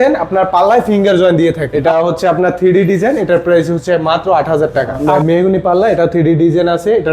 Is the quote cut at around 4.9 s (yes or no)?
yes